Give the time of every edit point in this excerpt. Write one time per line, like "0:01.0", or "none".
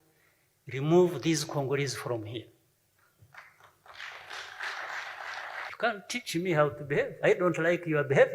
0:05.6